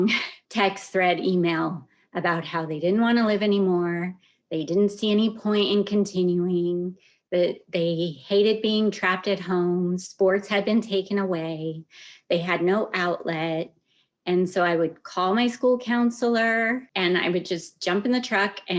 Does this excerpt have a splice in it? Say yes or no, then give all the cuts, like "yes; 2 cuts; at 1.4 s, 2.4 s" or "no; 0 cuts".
yes; 1 cut; at 16.9 s